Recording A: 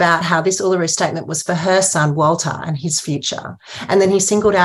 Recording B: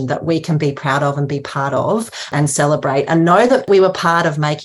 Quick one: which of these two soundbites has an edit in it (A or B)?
B